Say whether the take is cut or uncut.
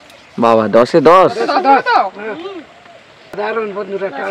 cut